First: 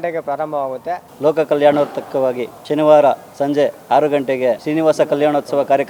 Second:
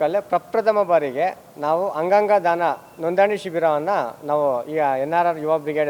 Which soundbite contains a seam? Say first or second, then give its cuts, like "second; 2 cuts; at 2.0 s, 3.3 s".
first; 3 cuts; at 1.1 s, 2.5 s, 4.6 s